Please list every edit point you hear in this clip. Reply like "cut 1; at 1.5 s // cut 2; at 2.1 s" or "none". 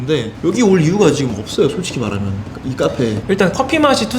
cut 1; at 3.2 s